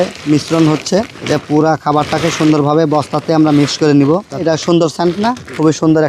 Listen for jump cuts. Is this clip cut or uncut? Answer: cut